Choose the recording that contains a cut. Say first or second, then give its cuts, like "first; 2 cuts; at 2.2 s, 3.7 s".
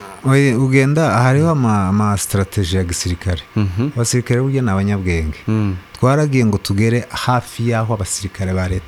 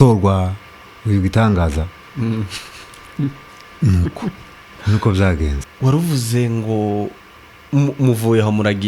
second; 1 cut; at 5.6 s